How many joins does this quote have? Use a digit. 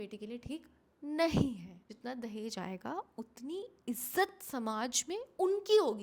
1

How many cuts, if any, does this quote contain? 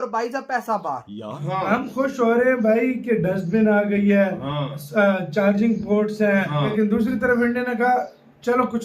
2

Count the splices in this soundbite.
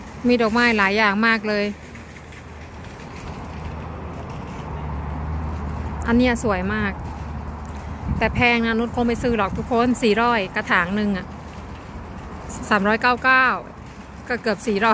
0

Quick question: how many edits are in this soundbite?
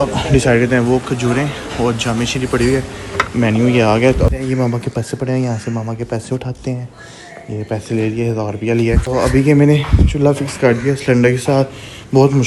2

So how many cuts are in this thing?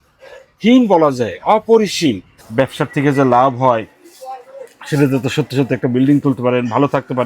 1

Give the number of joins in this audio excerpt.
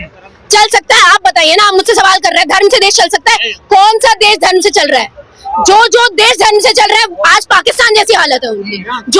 0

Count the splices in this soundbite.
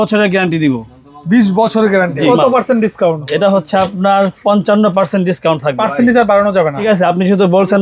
3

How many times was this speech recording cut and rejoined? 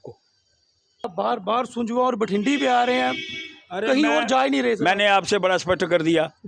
1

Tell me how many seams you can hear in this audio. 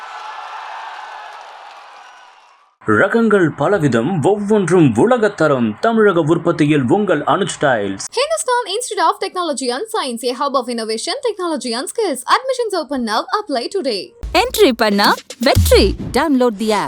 1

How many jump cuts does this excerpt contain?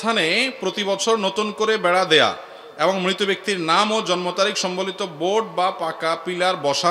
0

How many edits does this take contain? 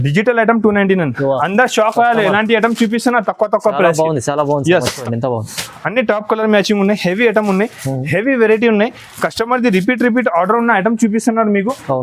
1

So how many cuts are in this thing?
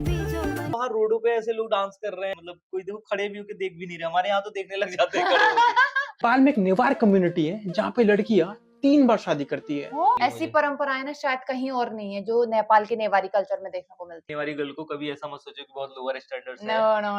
5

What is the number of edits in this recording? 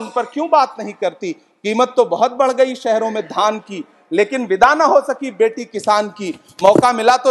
0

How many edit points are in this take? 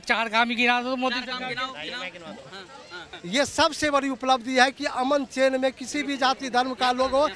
1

